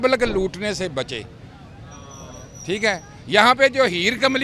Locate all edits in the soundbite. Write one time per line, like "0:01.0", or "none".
none